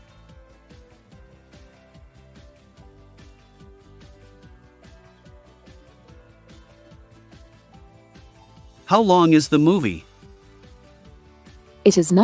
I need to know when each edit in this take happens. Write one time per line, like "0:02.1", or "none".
none